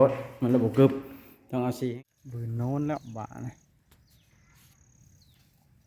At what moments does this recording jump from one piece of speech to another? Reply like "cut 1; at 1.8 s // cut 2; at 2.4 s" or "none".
cut 1; at 1.8 s